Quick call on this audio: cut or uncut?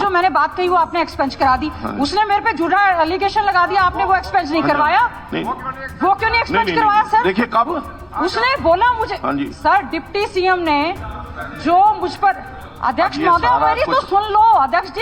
uncut